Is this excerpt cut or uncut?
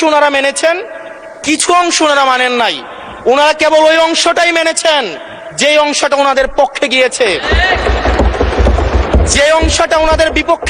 uncut